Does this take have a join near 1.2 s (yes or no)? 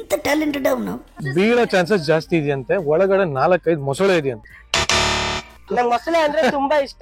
yes